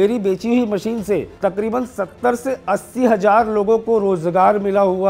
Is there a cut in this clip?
yes; 1 cut; at 1.3 s

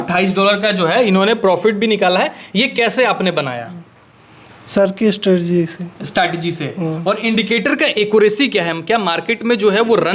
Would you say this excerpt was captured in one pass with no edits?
yes; 0 cuts

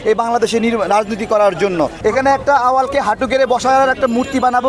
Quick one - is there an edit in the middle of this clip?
yes; 1 cut; at 1.9 s

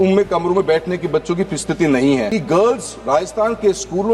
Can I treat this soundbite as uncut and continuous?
no; 1 cut; at 2.3 s

